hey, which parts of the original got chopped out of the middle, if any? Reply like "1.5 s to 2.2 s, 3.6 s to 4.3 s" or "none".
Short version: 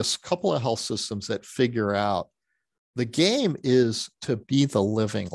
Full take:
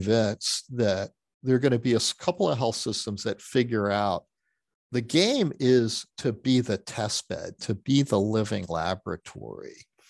6.4 s to 7.8 s